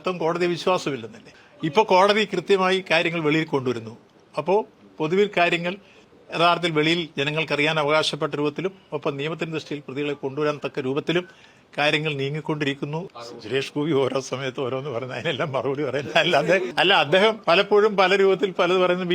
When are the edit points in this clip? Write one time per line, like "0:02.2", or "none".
0:13.1
0:17.1